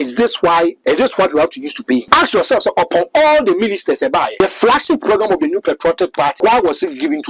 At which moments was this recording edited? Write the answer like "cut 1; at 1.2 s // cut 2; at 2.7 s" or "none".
cut 1; at 0.8 s // cut 2; at 2.0 s // cut 3; at 4.4 s // cut 4; at 6.4 s